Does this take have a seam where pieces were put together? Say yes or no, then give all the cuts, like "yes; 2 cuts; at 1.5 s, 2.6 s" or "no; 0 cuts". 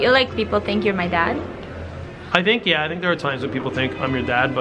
no; 0 cuts